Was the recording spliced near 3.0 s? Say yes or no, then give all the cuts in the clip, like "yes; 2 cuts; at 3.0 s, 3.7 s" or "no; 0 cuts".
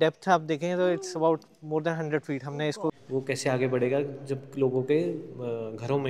yes; 1 cut; at 3.0 s